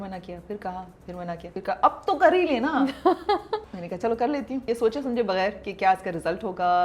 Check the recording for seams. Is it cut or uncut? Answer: cut